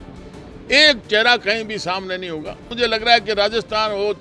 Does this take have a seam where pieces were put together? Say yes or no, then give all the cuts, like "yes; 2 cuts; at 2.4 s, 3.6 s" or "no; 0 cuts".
yes; 1 cut; at 2.7 s